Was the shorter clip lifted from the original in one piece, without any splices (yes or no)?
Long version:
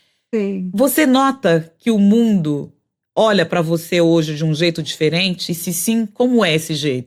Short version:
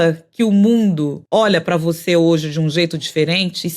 no